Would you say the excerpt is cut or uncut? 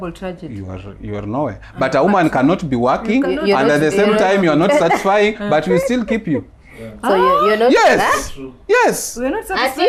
uncut